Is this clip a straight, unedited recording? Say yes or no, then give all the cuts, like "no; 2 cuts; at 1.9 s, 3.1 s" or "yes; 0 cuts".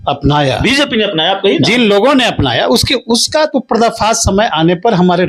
yes; 0 cuts